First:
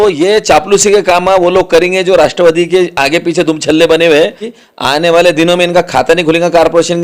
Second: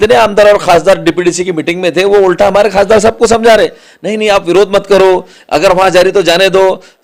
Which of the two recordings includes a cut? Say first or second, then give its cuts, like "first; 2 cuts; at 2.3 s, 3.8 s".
first; 1 cut; at 4.5 s